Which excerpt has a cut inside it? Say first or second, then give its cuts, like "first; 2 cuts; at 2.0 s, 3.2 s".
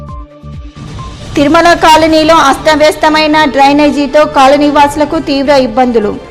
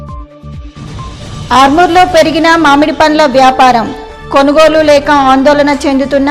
second; 1 cut; at 1.2 s